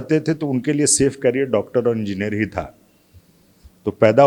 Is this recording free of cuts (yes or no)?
yes